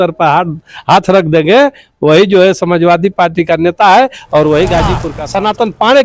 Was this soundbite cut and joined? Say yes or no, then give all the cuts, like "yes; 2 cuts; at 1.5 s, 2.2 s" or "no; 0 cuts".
yes; 1 cut; at 5.1 s